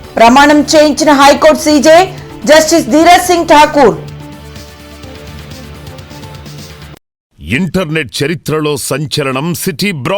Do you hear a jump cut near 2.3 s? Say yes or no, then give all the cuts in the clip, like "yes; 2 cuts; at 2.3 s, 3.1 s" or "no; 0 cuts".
no; 1 cut; at 7.3 s